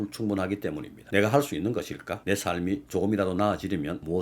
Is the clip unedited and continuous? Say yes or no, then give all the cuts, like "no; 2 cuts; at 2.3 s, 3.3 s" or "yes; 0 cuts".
no; 1 cut; at 0.9 s